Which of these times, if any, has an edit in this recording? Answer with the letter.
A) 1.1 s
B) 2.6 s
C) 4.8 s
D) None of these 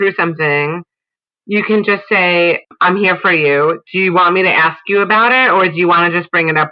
B